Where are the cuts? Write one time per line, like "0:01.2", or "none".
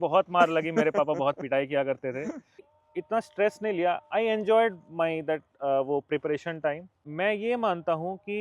0:02.6
0:07.0